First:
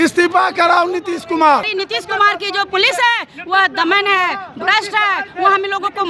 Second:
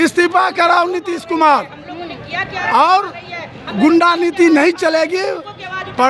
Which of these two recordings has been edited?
first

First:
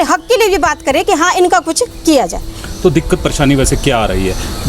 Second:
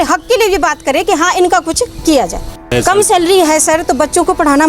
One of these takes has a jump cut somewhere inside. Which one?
second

